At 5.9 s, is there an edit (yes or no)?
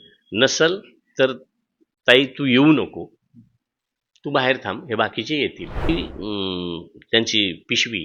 yes